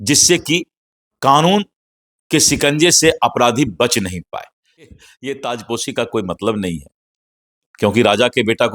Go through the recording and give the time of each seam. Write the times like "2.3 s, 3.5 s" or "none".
4.9 s